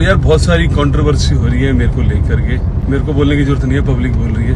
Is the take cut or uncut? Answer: cut